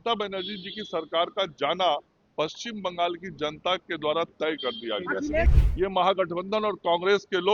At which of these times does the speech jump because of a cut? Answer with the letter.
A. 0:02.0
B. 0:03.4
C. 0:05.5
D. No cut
C